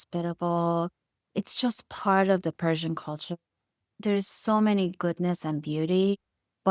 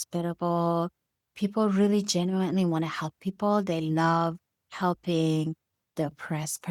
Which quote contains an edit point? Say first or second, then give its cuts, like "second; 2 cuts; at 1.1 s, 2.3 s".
first; 3 cuts; at 1.2 s, 2.6 s, 4.0 s